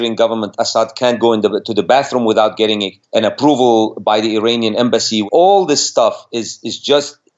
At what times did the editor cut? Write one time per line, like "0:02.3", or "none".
0:02.9
0:05.2